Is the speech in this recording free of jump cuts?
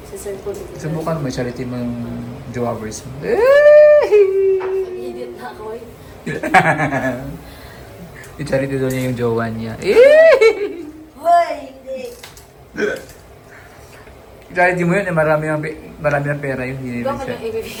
yes; 0 cuts

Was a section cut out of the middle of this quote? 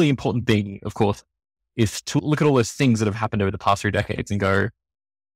yes; 1 cut; at 2.2 s

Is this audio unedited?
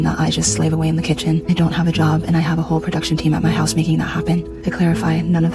yes; 0 cuts

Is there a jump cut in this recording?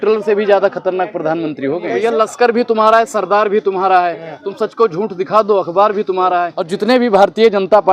yes; 2 cuts; at 1.9 s, 6.6 s

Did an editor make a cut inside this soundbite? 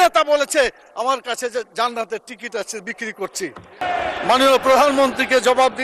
yes; 1 cut; at 3.8 s

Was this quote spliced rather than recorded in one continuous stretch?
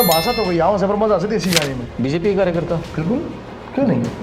yes; 1 cut; at 1.9 s

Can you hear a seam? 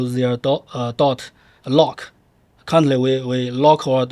no; 0 cuts

